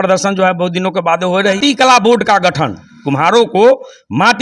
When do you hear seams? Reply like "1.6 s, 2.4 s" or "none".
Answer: 1.6 s